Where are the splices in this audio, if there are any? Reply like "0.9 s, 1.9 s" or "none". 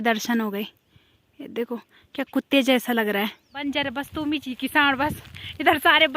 3.6 s